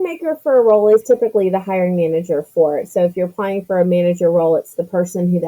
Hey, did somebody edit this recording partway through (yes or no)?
no